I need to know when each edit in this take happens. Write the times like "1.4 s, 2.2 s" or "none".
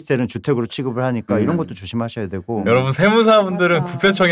none